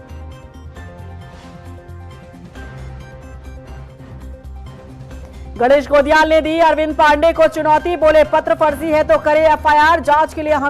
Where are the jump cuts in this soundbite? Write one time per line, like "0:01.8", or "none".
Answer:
none